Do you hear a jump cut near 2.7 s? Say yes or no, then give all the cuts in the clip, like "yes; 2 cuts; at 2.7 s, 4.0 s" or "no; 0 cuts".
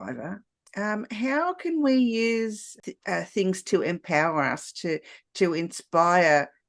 yes; 1 cut; at 2.7 s